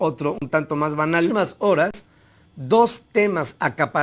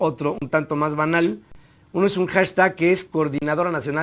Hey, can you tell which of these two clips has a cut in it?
second; 1 cut; at 1.3 s

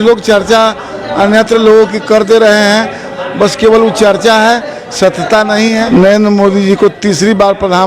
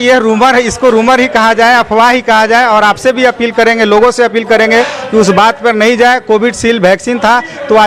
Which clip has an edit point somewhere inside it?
first; 1 cut; at 5.8 s

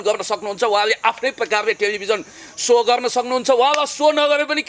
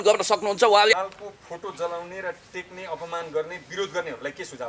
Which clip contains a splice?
second; 1 cut; at 1.0 s

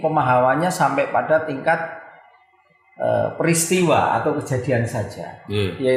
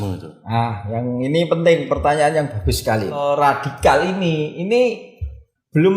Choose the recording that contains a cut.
second; 1 cut; at 3.2 s

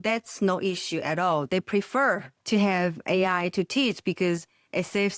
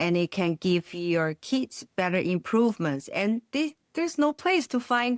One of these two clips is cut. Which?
first; 1 cut; at 2.3 s

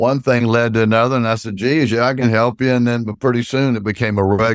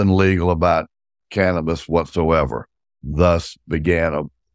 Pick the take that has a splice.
second; 1 cut; at 3.0 s

